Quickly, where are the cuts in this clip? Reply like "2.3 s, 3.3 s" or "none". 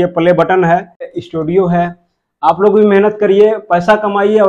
1.1 s